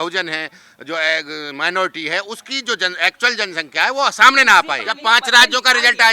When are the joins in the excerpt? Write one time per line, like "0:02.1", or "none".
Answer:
0:04.9